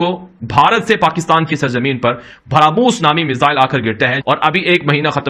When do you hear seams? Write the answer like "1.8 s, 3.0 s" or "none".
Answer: 4.2 s